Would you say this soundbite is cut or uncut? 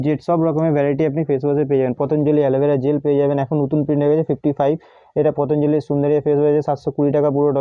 uncut